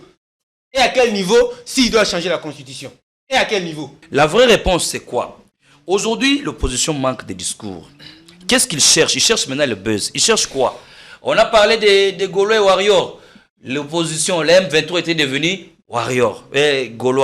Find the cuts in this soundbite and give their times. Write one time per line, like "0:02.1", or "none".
0:03.9

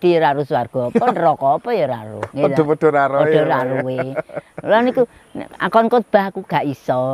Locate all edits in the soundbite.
none

